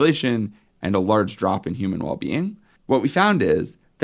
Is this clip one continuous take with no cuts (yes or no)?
no